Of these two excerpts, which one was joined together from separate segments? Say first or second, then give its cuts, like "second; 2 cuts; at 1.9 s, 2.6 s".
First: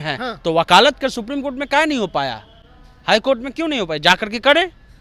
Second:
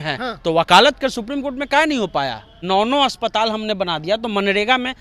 second; 1 cut; at 2.5 s